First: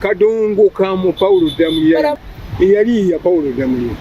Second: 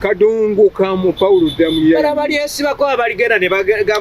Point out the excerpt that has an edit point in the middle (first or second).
first